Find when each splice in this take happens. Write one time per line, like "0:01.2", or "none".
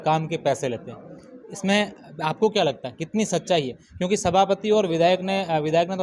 none